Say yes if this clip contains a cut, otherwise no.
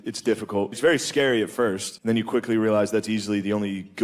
yes